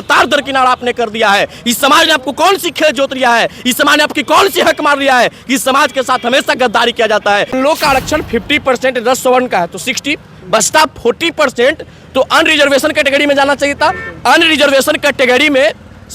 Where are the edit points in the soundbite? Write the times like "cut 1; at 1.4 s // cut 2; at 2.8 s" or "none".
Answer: cut 1; at 7.5 s

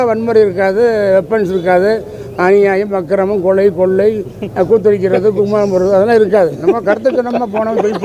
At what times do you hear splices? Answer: none

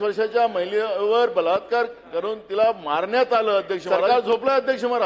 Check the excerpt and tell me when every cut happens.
cut 1; at 3.9 s

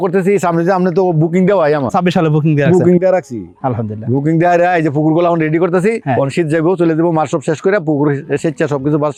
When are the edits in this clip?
none

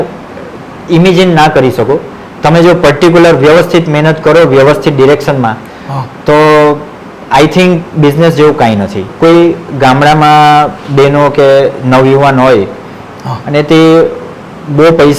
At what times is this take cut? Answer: cut 1; at 9.0 s

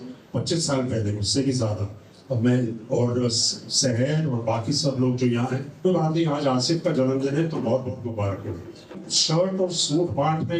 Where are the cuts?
cut 1; at 5.8 s // cut 2; at 9.0 s

